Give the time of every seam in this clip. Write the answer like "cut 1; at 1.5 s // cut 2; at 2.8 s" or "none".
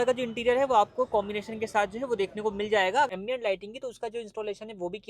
cut 1; at 3.1 s